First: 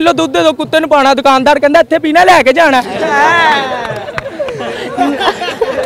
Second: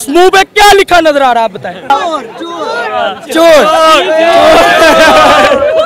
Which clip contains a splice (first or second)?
second